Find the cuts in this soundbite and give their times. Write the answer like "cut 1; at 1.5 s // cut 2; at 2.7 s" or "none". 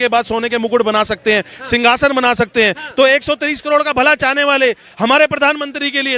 none